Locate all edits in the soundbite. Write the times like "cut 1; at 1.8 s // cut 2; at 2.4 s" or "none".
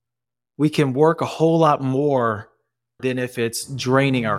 cut 1; at 3.0 s